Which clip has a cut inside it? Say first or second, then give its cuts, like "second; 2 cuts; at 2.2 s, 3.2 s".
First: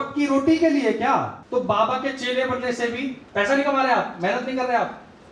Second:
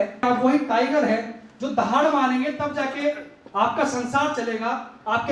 first; 2 cuts; at 1.4 s, 3.2 s